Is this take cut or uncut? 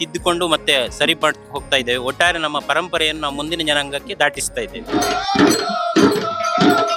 uncut